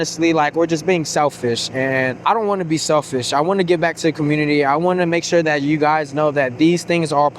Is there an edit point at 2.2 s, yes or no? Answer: yes